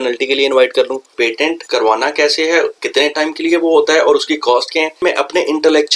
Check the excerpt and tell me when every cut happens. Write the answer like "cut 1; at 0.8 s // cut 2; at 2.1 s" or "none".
cut 1; at 1.3 s // cut 2; at 2.8 s // cut 3; at 5.0 s